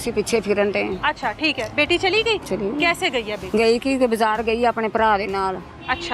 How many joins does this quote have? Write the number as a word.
two